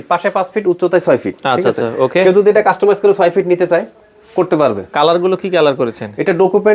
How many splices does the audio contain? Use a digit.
0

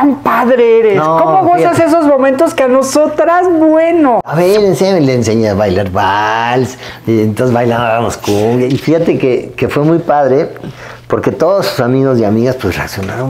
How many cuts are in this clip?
2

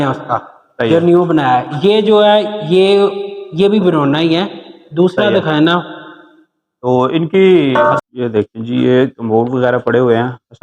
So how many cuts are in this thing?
1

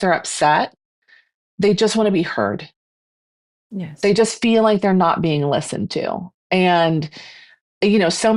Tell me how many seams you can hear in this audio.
0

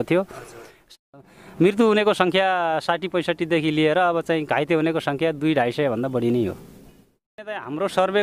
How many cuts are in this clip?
2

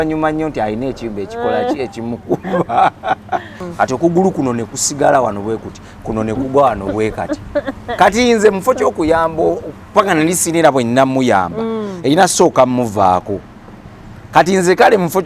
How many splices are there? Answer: 1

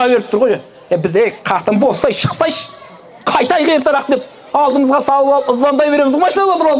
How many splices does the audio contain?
0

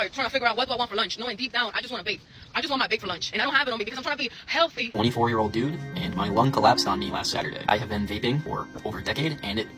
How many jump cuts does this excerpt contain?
3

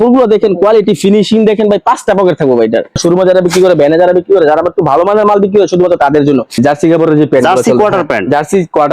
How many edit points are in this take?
2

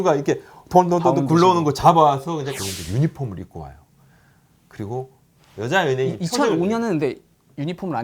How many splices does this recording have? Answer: 2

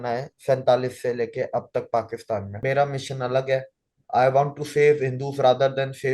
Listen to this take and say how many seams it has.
1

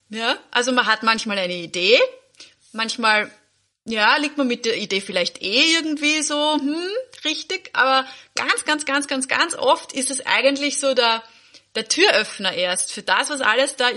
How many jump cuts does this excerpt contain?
0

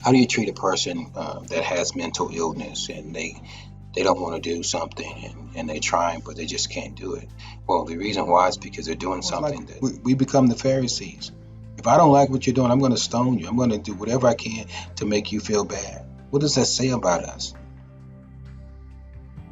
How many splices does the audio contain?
1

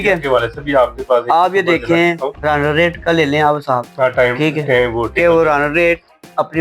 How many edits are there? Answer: 2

